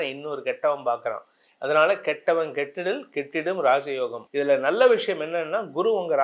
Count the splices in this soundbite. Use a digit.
1